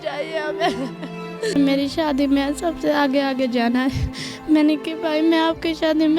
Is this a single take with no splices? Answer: no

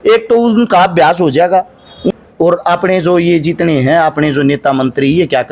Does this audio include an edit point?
yes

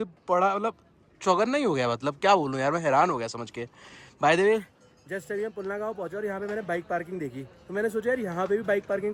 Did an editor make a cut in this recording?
no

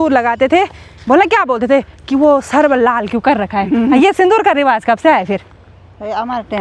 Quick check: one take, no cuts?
yes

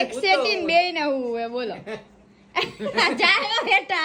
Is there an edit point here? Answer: no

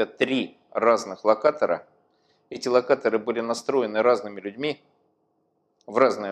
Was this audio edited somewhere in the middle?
no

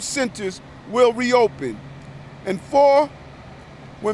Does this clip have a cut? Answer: no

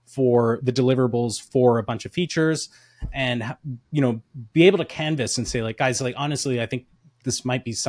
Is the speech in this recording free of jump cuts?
yes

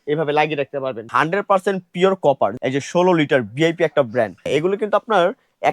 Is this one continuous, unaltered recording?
no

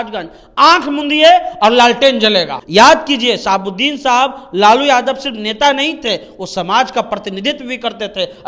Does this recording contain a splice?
yes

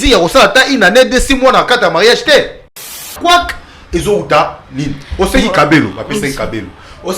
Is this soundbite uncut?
no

